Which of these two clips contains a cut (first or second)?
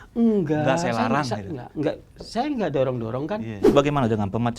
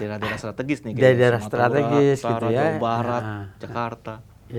first